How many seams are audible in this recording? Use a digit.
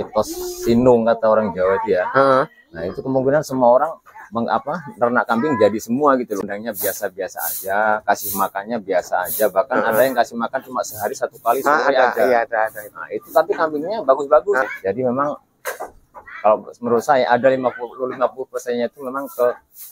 2